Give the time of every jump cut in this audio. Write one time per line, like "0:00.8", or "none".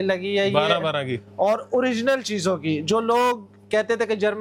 none